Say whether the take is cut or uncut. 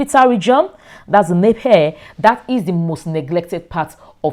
uncut